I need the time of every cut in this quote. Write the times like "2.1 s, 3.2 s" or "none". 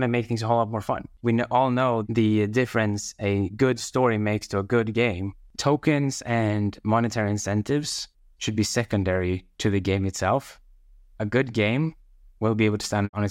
1.1 s, 5.5 s